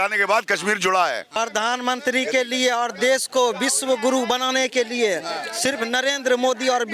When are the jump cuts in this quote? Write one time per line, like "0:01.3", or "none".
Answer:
0:01.4